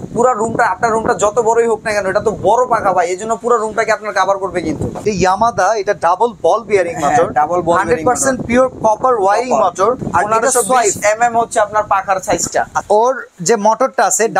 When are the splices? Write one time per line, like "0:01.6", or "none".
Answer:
0:05.0
0:10.0
0:12.8